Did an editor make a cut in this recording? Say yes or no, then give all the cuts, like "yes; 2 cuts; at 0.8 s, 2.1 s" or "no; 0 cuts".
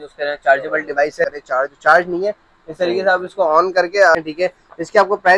yes; 2 cuts; at 1.2 s, 4.1 s